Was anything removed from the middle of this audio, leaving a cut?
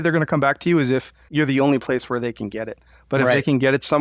yes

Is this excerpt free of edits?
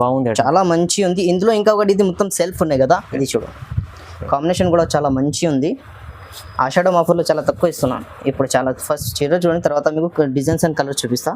no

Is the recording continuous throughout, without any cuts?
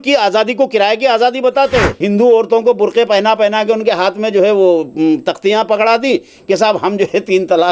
no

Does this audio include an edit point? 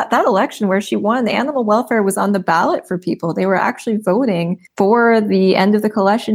yes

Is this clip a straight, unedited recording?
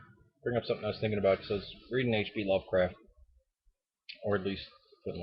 yes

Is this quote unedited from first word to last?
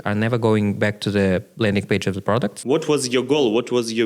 no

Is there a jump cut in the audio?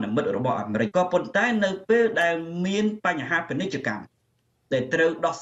yes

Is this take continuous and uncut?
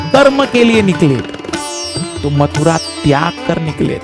yes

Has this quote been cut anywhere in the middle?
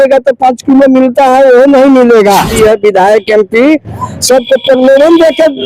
yes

